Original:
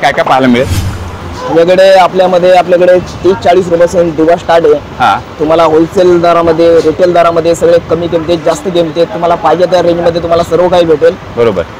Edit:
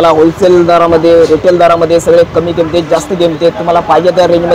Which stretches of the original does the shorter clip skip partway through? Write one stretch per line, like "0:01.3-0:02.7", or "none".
none